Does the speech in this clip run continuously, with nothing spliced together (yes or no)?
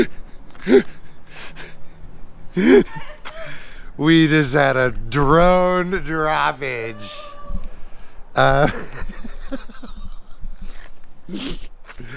yes